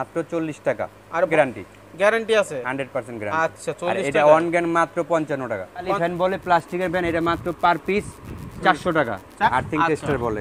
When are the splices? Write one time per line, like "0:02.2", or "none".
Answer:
0:01.3
0:05.9
0:09.3